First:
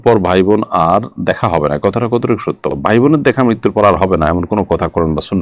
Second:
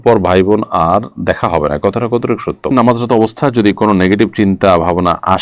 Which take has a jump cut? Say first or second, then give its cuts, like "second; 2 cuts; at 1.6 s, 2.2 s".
second; 1 cut; at 2.7 s